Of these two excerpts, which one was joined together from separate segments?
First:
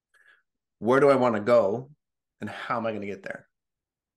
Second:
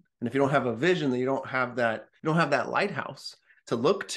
second; 1 cut; at 2.1 s

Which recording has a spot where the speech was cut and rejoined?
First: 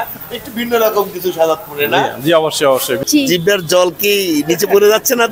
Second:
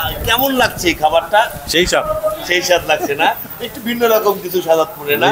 first; 1 cut; at 3.0 s

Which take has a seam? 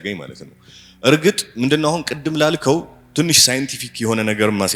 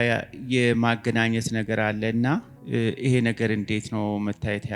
second; 1 cut; at 2.6 s

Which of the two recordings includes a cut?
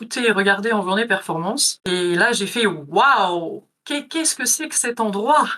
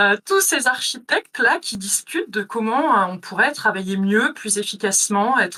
first; 1 cut; at 1.7 s

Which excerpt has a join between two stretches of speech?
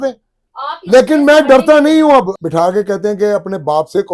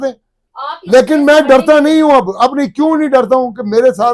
first; 1 cut; at 2.3 s

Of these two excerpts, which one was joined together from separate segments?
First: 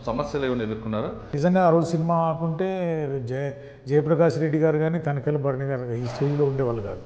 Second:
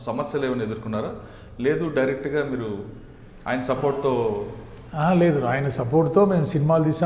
first; 1 cut; at 1.3 s

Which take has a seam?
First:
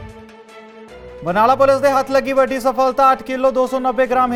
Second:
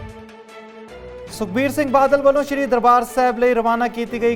second; 1 cut; at 1.2 s

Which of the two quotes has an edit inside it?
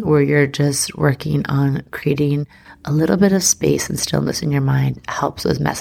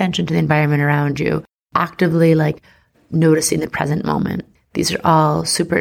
second; 1 cut; at 4.6 s

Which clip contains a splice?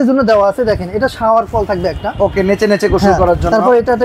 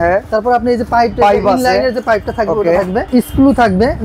second; 1 cut; at 3.1 s

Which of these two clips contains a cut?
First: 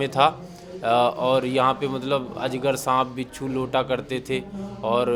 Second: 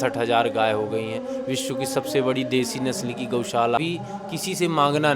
second; 1 cut; at 3.8 s

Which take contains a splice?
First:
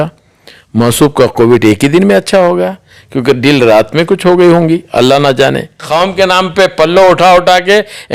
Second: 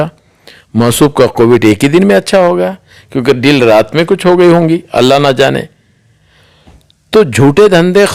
first; 1 cut; at 5.8 s

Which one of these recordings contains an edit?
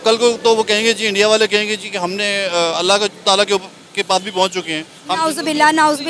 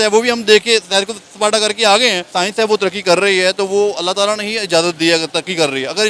second; 1 cut; at 2.3 s

